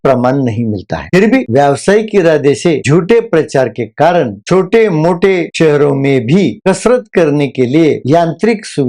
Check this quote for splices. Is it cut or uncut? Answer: cut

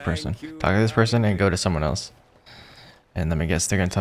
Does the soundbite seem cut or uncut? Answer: uncut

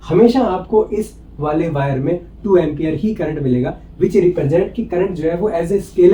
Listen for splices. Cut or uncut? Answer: uncut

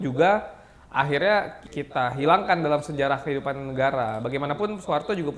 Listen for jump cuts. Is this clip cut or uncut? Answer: cut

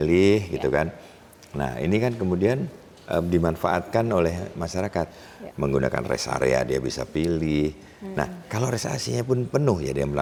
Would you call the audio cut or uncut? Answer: uncut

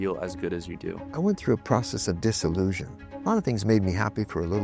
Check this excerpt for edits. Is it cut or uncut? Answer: cut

